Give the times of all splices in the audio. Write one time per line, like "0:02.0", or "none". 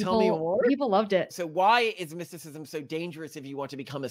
0:01.3